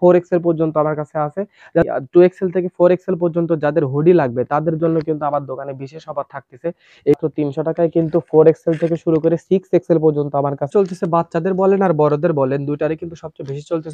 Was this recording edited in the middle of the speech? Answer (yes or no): yes